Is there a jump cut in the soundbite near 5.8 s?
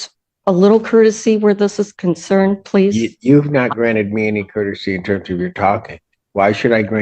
no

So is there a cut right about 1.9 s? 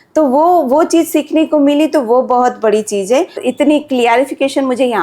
no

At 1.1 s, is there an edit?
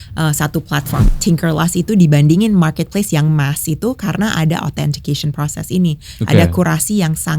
yes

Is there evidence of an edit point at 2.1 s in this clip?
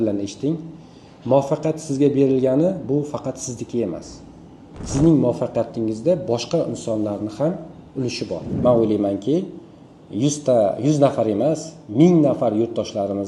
no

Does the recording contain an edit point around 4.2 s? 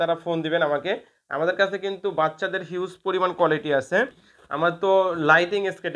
no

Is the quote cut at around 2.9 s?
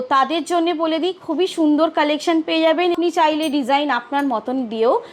yes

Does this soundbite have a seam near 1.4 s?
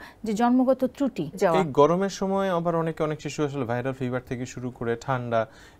yes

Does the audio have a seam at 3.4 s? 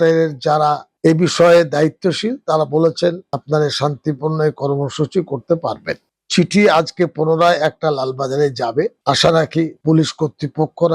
no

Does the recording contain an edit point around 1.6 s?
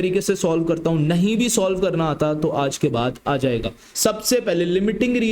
no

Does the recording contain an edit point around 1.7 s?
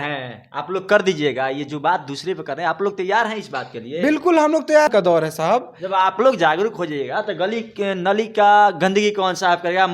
no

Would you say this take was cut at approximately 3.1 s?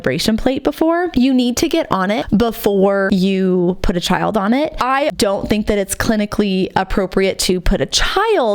yes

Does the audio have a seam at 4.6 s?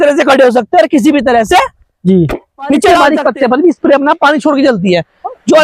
no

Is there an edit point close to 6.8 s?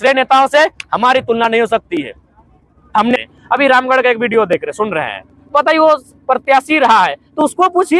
no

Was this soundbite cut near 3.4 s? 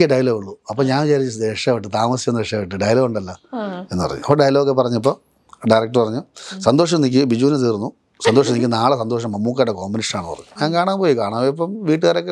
no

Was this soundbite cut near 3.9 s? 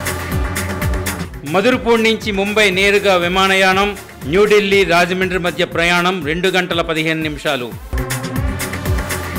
no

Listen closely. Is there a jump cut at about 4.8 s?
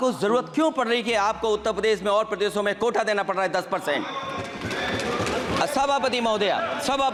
no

